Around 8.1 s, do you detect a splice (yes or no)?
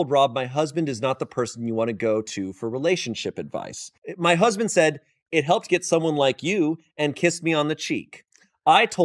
yes